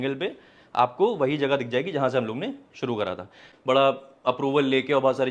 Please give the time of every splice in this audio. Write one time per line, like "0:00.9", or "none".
0:03.5